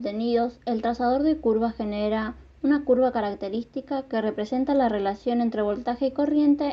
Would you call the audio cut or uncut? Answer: uncut